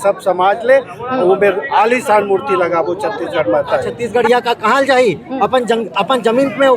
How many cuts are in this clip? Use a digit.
1